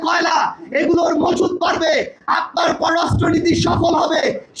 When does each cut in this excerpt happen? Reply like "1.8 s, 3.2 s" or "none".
none